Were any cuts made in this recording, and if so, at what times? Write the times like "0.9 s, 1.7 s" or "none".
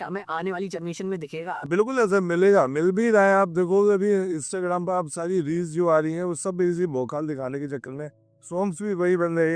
none